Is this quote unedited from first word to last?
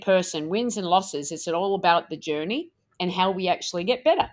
yes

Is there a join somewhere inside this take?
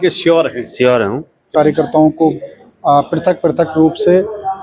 yes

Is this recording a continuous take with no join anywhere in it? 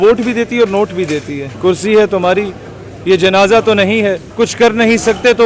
no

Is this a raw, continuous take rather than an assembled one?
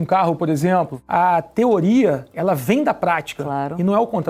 no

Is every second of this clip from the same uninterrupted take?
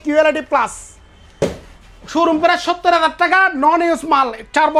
yes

